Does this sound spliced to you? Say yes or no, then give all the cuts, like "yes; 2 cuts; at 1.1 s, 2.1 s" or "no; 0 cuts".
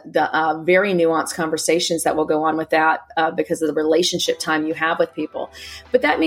no; 0 cuts